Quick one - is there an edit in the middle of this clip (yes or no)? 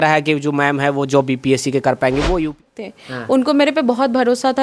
yes